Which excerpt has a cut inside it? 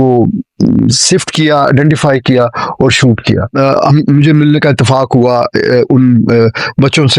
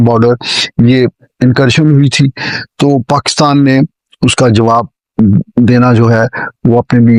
first; 1 cut; at 3.5 s

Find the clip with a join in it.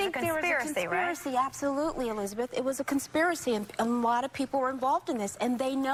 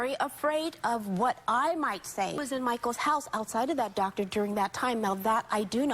second; 1 cut; at 2.4 s

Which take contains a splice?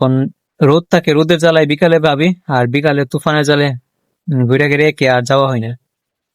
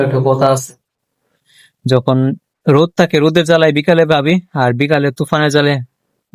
second; 1 cut; at 1.0 s

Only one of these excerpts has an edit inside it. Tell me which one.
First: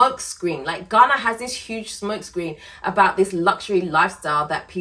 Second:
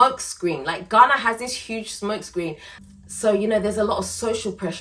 second; 1 cut; at 2.7 s

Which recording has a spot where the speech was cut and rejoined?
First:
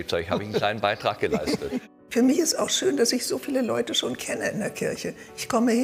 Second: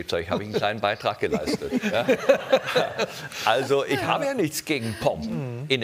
first; 1 cut; at 1.9 s

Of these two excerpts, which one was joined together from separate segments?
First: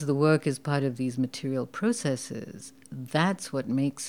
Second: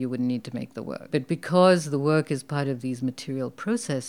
second; 1 cut; at 0.9 s

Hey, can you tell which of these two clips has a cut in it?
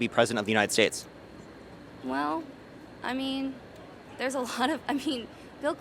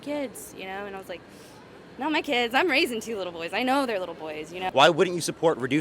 second; 1 cut; at 4.6 s

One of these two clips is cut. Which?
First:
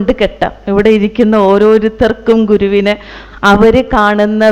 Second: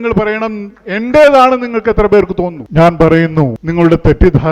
second; 2 cuts; at 2.6 s, 3.6 s

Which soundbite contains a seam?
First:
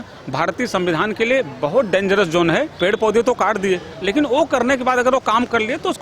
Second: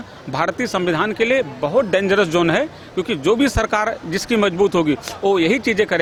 first; 1 cut; at 2.7 s

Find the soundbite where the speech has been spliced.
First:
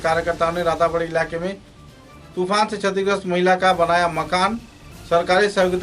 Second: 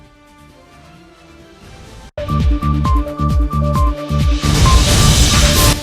second; 1 cut; at 2.1 s

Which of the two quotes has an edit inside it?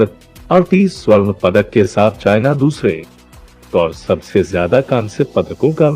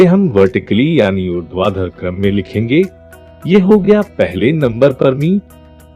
first; 1 cut; at 3.5 s

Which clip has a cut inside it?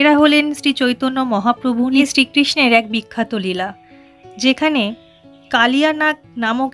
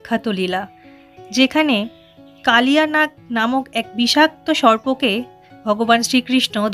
first; 1 cut; at 2.1 s

